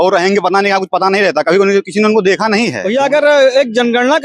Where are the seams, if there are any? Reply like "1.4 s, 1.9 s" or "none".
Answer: 2.8 s